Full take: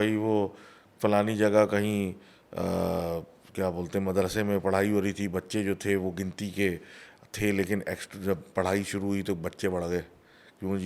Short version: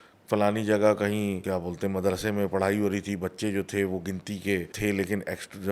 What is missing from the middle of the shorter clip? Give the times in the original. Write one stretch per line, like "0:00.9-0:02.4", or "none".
0:02.1-0:03.5
0:06.8-0:07.3